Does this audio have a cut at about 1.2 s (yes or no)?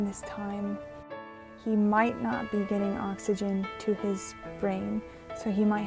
yes